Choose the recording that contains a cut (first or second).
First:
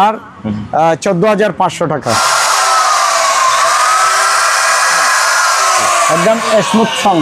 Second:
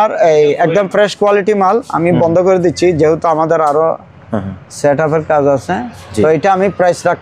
first